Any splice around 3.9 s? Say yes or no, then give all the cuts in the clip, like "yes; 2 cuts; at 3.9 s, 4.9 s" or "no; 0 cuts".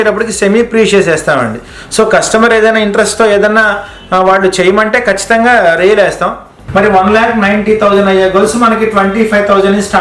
no; 1 cut; at 6.6 s